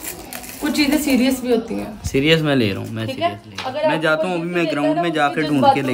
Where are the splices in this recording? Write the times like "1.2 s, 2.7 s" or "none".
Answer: none